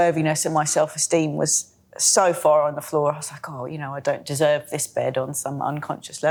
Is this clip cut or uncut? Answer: uncut